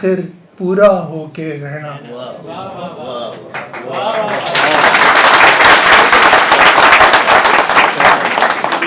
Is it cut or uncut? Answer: uncut